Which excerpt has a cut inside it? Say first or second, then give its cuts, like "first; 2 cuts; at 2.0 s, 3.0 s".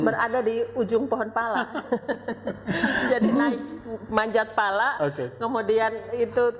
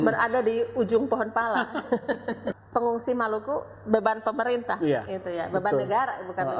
second; 1 cut; at 2.5 s